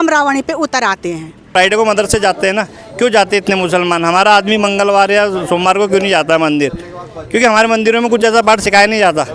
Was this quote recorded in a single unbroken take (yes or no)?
no